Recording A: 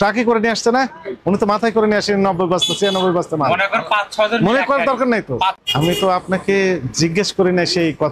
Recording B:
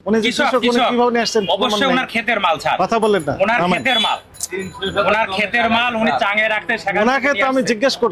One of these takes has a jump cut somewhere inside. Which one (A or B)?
A